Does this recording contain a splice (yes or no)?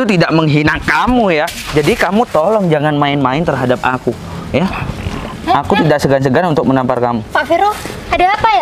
no